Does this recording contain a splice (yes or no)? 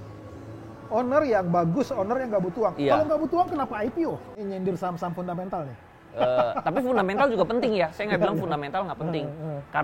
yes